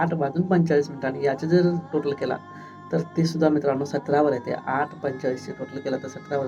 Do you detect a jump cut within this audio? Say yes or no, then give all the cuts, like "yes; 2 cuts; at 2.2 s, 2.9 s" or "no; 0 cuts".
no; 0 cuts